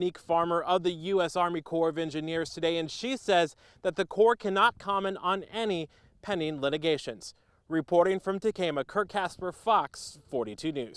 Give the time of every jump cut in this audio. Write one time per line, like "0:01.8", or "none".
none